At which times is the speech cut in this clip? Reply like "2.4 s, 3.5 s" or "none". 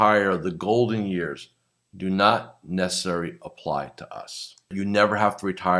4.7 s